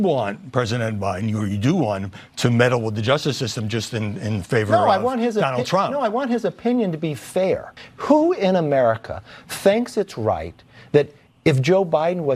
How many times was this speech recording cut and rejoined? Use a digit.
1